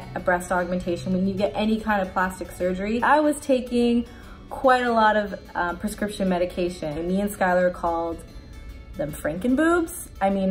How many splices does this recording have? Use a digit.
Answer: 2